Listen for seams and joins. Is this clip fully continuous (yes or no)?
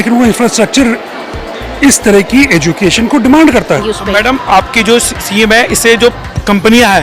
no